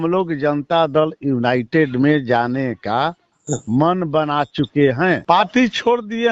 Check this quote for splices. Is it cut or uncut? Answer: cut